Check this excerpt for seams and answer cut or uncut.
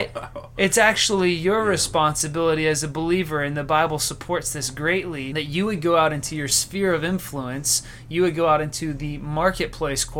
cut